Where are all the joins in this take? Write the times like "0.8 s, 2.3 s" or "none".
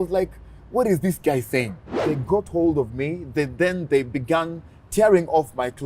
2.0 s